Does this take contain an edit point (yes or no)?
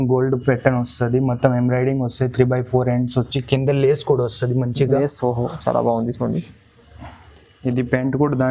no